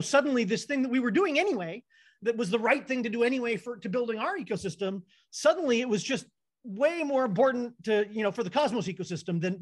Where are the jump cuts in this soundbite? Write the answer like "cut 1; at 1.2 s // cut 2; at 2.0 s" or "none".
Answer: none